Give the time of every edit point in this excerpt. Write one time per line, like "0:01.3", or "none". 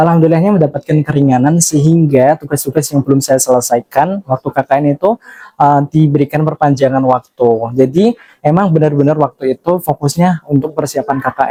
none